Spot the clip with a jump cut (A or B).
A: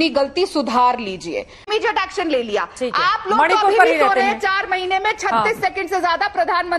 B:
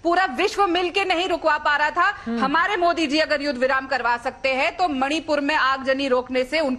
A